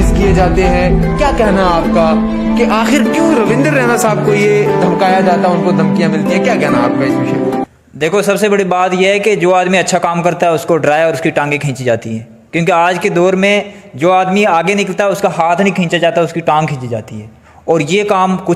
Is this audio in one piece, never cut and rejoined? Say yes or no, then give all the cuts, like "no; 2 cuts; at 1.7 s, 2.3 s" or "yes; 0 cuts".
yes; 0 cuts